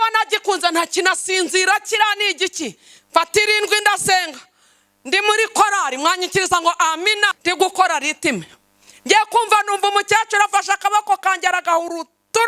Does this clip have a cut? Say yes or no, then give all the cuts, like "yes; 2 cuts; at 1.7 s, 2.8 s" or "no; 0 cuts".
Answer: yes; 1 cut; at 7.3 s